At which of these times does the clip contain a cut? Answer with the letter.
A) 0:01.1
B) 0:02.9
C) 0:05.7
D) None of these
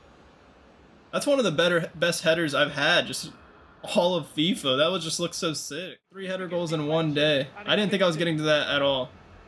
C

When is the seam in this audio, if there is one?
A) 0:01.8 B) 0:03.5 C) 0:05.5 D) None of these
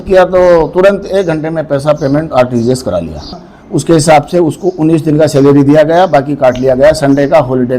B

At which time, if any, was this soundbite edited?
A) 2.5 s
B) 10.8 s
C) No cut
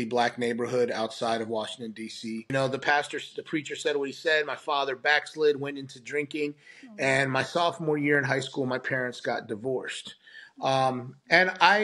A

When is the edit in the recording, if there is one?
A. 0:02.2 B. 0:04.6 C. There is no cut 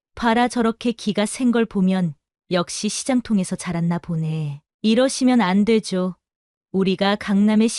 B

